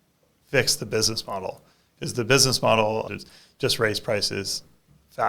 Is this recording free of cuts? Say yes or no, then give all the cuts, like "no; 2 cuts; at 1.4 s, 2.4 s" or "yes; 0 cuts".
no; 1 cut; at 3.1 s